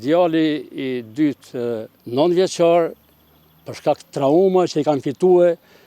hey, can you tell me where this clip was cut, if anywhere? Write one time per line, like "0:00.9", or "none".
0:02.0